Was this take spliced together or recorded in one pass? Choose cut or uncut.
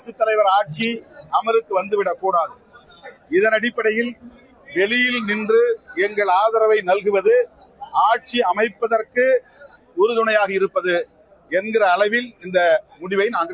uncut